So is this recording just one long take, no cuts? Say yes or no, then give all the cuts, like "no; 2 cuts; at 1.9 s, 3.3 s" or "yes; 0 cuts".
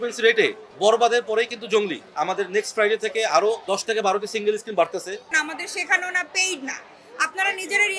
no; 2 cuts; at 2.0 s, 5.3 s